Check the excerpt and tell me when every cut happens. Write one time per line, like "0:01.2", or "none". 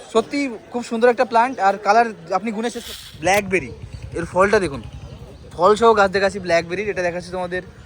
0:02.9